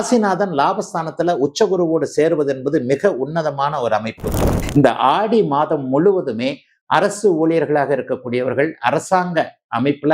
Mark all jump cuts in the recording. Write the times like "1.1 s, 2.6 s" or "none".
4.5 s